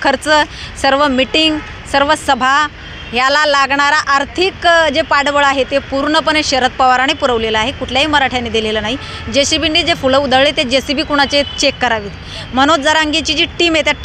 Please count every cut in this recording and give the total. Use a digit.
0